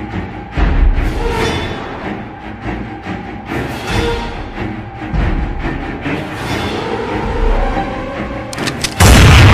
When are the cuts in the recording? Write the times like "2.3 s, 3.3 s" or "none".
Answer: 0.9 s